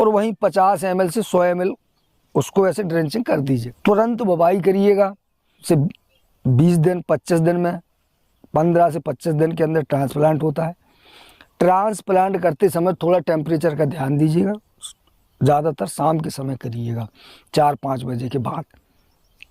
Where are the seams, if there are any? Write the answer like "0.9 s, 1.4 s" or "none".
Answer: 3.7 s, 5.6 s